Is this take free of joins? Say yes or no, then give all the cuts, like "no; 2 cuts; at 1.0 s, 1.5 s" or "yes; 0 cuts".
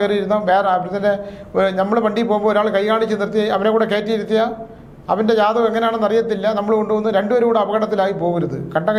yes; 0 cuts